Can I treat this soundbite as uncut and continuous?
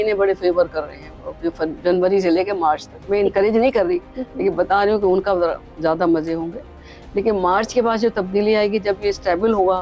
yes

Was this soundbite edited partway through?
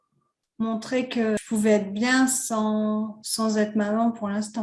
yes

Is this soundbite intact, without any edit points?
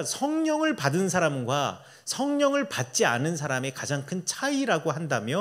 yes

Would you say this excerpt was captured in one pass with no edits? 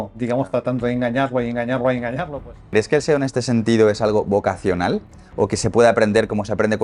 no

